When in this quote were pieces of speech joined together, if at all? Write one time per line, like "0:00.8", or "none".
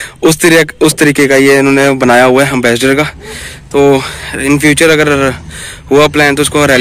none